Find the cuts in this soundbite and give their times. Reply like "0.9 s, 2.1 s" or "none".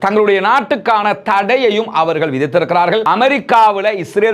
3.0 s